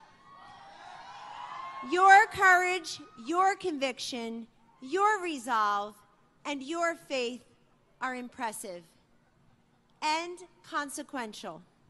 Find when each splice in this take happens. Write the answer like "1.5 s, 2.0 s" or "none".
4.0 s